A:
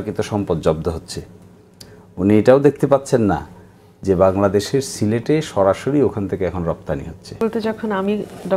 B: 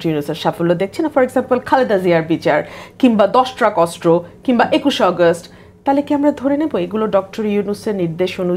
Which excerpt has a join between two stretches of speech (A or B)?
A